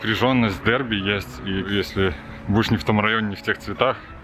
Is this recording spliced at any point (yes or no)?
yes